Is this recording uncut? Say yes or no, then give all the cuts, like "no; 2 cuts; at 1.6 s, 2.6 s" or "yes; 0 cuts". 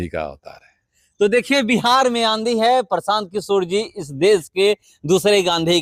yes; 0 cuts